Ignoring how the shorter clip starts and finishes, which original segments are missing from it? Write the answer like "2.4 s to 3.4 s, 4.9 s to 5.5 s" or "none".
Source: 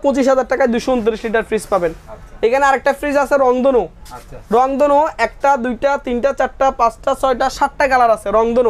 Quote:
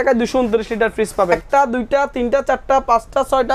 1.9 s to 5.3 s